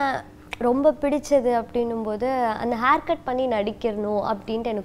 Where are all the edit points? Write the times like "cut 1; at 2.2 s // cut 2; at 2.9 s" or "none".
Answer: none